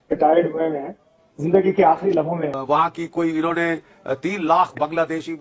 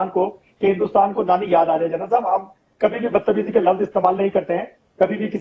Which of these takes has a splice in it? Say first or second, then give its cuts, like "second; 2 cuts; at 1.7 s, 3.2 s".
first; 1 cut; at 2.6 s